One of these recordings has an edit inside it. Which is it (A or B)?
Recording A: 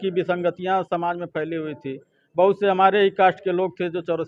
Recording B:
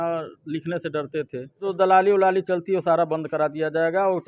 B